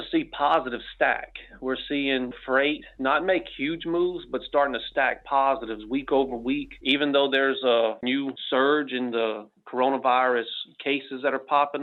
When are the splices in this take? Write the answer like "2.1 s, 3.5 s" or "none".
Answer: none